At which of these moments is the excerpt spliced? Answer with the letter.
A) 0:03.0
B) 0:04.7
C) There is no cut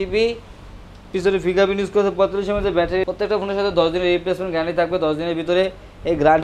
A